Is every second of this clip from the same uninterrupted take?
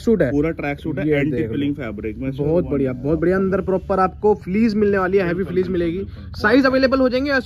yes; 0 cuts

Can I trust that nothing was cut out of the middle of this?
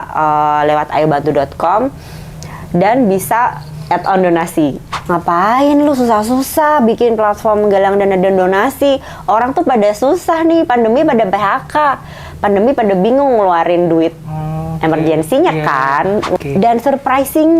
no; 2 cuts; at 4.9 s, 16.4 s

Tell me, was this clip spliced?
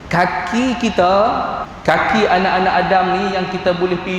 yes; 1 cut; at 1.6 s

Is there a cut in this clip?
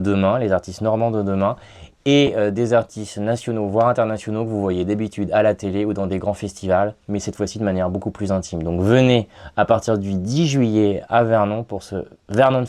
no; 0 cuts

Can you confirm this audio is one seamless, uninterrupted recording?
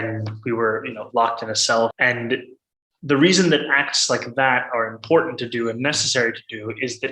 no; 1 cut; at 1.9 s

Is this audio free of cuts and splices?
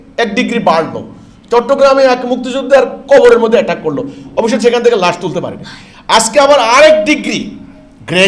yes; 0 cuts

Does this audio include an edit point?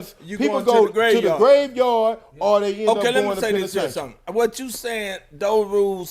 no; 0 cuts

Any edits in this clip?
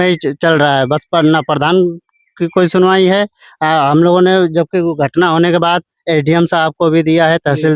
no; 0 cuts

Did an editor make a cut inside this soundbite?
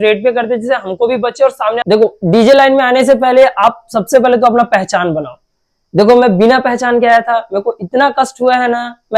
yes; 1 cut; at 1.8 s

